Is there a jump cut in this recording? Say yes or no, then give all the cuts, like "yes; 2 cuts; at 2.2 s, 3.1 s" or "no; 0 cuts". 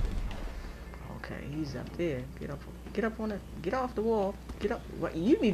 yes; 1 cut; at 1.0 s